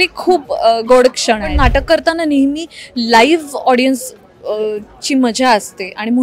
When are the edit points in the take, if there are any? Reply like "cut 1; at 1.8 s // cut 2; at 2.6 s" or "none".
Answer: cut 1; at 1.5 s